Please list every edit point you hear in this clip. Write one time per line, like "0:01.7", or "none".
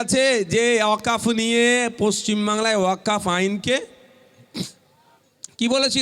none